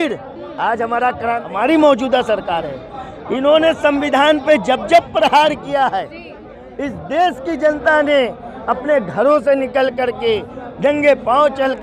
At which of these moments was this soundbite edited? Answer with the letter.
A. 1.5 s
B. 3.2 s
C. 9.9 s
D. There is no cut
A